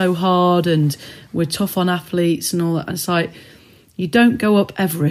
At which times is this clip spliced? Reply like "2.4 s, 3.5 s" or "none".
none

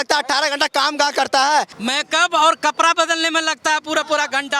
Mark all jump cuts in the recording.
1.7 s

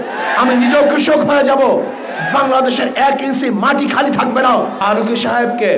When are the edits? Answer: 4.8 s

